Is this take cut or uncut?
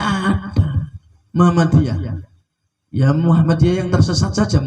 uncut